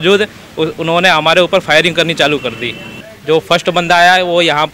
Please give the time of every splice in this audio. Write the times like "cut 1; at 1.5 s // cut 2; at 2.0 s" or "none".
cut 1; at 3.0 s